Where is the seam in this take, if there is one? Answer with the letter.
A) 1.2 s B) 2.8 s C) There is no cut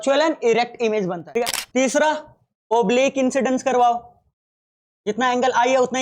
A